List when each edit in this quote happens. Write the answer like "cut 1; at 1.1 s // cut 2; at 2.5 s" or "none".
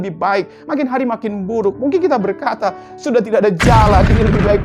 none